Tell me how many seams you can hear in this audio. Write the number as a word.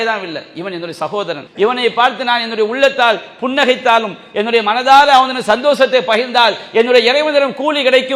one